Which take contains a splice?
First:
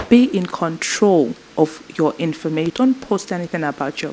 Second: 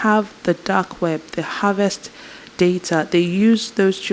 first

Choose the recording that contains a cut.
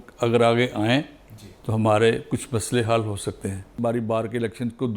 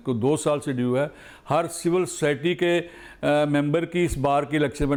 first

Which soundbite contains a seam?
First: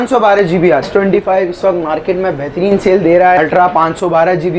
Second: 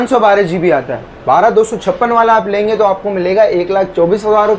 first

